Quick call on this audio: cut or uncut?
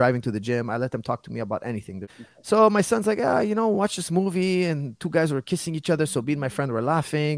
cut